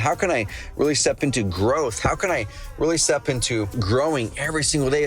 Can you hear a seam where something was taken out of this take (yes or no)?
yes